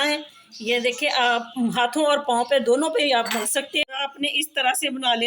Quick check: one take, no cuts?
no; 1 cut; at 3.8 s

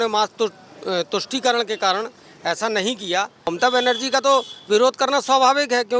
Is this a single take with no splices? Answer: no; 1 cut; at 3.5 s

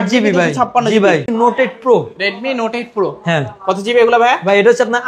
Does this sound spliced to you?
yes; 1 cut; at 1.3 s

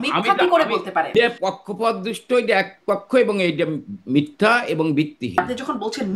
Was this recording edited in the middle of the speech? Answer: yes; 2 cuts; at 1.1 s, 5.4 s

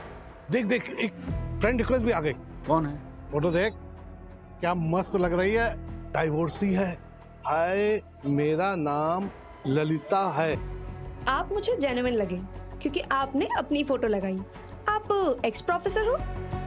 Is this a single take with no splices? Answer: yes; 0 cuts

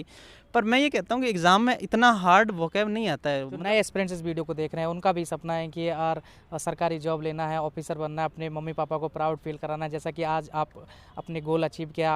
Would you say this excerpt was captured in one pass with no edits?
no; 1 cut; at 3.5 s

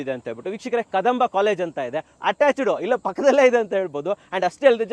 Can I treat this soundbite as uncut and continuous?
yes; 0 cuts

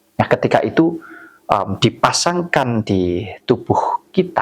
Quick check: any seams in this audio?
no; 0 cuts

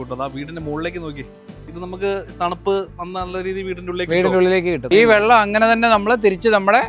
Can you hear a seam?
yes; 2 cuts; at 1.7 s, 4.8 s

